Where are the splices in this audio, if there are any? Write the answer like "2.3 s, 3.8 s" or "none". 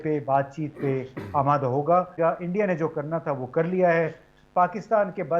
2.2 s